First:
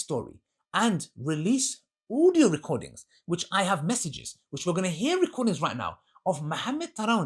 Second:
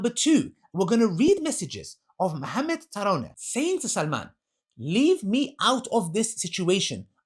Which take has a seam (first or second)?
second